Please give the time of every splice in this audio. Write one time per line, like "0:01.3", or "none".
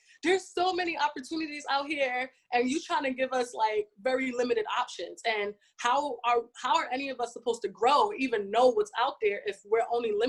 none